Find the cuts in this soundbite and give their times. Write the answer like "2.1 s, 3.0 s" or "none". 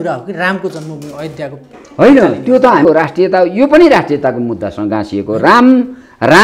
2.9 s